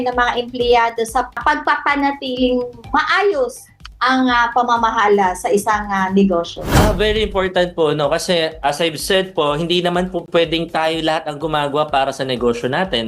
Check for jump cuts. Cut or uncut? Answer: cut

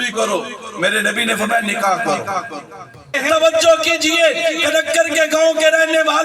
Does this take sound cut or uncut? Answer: cut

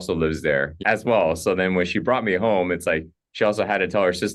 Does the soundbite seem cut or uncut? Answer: uncut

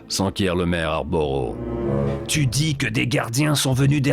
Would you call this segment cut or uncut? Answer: cut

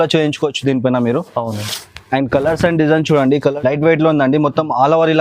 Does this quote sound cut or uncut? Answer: cut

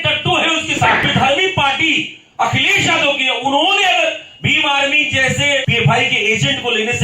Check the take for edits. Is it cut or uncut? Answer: cut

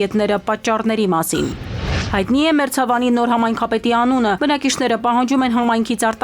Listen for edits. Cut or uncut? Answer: cut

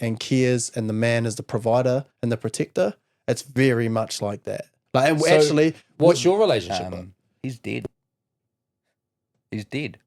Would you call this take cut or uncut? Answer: cut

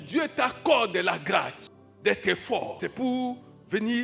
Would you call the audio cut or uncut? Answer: cut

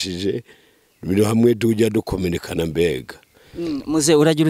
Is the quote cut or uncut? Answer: uncut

